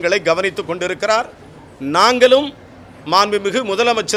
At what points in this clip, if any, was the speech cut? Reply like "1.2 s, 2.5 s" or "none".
none

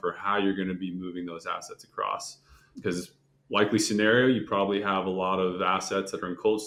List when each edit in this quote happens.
none

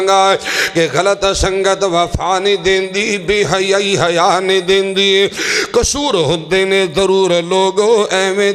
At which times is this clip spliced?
none

